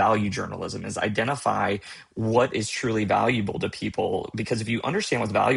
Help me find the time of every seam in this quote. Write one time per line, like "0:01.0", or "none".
none